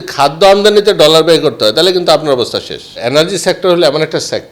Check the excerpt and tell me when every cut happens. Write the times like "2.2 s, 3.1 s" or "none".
2.9 s